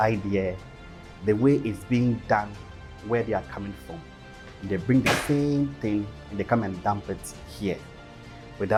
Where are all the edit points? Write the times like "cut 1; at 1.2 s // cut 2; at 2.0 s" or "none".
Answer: none